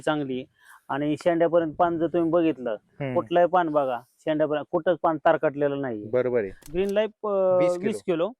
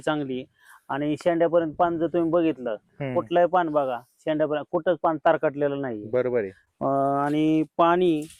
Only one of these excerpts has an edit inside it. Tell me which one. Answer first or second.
first